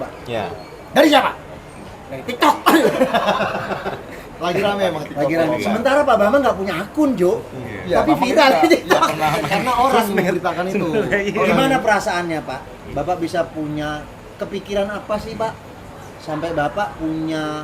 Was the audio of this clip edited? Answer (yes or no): no